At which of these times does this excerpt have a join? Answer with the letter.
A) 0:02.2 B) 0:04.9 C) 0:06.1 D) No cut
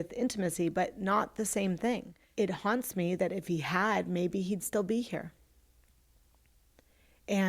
A